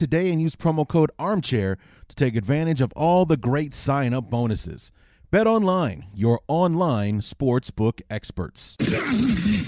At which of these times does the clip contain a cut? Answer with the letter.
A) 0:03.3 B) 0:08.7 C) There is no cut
B